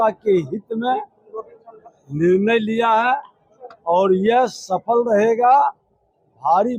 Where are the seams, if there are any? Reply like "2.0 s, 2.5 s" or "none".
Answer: none